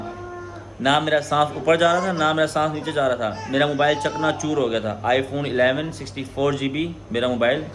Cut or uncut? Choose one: uncut